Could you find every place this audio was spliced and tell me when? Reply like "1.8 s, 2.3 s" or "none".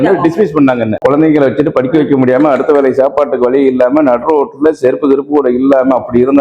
1.0 s